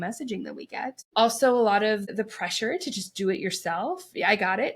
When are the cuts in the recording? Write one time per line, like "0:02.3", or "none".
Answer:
0:01.0
0:02.1